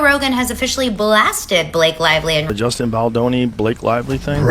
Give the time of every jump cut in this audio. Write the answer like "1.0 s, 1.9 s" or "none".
2.5 s